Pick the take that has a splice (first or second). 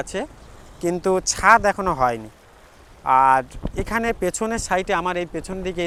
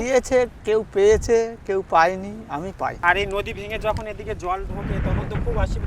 second